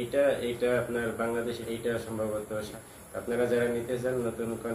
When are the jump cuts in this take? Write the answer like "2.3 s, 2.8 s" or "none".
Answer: 1.6 s, 2.7 s